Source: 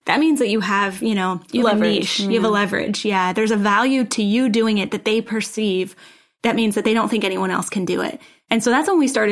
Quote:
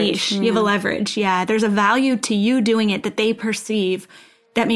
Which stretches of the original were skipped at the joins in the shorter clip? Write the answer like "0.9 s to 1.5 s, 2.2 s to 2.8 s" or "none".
none

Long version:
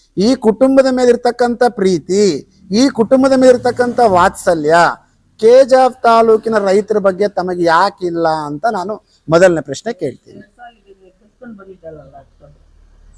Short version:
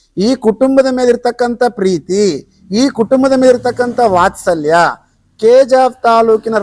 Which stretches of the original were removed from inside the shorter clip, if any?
none

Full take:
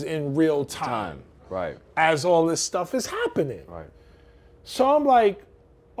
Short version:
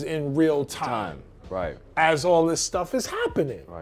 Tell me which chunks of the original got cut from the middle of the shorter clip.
none

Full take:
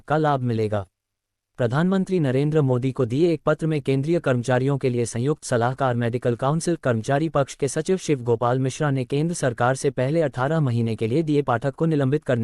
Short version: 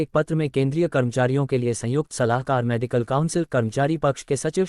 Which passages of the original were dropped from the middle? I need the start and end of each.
none

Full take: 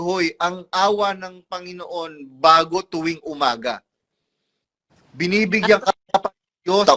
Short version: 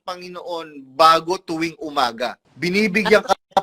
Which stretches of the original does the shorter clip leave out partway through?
3.9 s to 5.0 s

